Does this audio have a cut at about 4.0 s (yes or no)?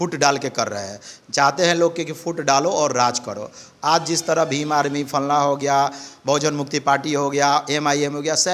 no